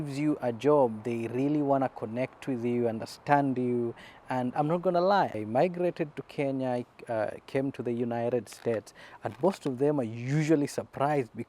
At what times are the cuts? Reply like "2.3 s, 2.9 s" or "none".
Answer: 5.3 s